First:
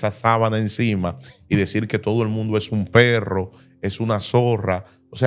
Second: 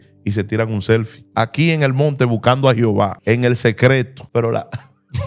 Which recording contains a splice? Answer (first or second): second